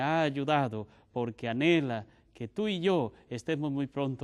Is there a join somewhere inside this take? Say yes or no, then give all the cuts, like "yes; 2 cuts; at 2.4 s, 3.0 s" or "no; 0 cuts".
yes; 1 cut; at 2.4 s